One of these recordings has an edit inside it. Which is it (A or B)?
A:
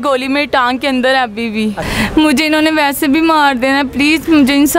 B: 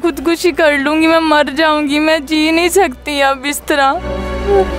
A